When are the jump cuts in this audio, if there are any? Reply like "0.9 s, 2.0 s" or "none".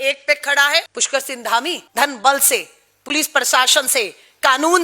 1.0 s, 1.8 s